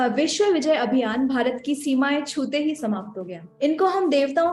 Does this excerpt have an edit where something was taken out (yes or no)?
yes